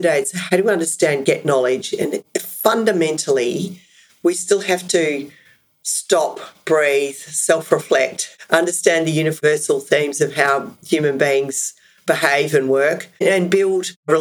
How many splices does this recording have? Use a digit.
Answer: 0